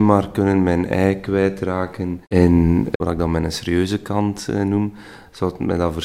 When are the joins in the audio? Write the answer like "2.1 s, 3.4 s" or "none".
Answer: none

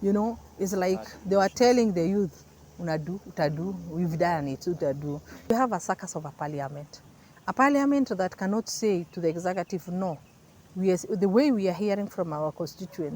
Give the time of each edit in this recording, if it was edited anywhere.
5.5 s

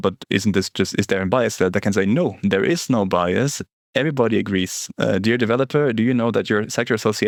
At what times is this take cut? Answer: none

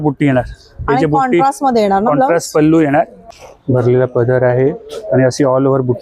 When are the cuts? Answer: 3.2 s

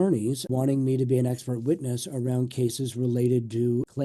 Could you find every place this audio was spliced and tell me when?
none

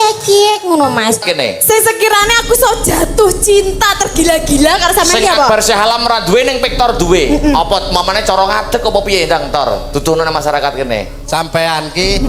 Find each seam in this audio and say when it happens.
1.2 s

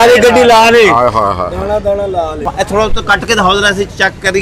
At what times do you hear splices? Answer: 2.4 s

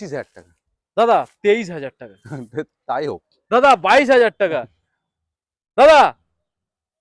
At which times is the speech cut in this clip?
none

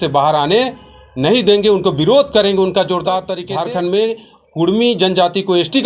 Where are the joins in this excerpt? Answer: 3.4 s

